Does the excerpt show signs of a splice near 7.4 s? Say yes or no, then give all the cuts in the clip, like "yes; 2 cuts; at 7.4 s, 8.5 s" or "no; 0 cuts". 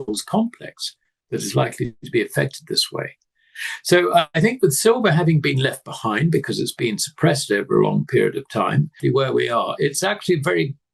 no; 1 cut; at 9.0 s